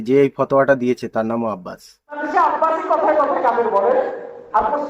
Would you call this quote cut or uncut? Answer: cut